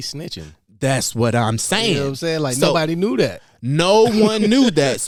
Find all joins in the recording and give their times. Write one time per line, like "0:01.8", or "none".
none